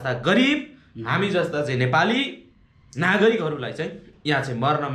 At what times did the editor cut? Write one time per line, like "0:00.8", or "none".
0:04.1